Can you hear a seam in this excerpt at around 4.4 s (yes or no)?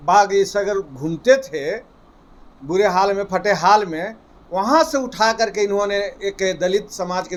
no